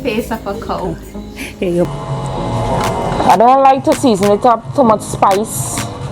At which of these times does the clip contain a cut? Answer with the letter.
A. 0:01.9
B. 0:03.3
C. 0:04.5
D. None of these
A